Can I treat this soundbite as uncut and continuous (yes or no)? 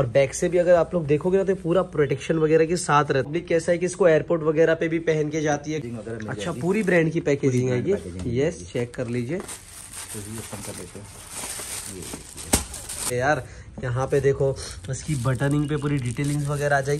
no